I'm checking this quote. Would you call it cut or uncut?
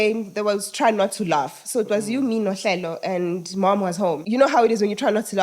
cut